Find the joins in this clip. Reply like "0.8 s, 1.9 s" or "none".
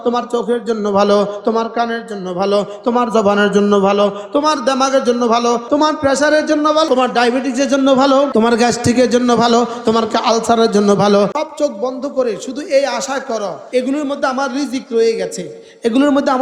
5.6 s, 6.9 s, 8.3 s, 11.3 s, 13.6 s